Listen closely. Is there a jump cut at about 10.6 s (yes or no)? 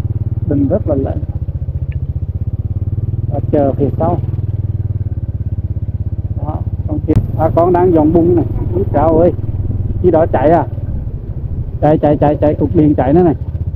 no